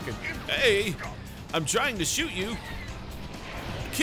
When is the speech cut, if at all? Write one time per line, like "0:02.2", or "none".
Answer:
none

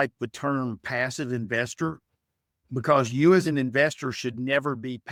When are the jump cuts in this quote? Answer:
none

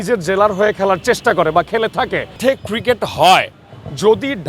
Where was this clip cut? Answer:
0:02.4

